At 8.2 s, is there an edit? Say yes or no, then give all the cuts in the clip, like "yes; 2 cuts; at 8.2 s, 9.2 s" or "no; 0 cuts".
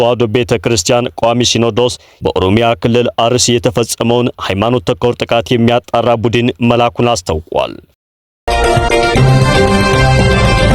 yes; 1 cut; at 8.2 s